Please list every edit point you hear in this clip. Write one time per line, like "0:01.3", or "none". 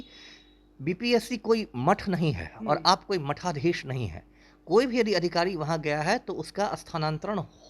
none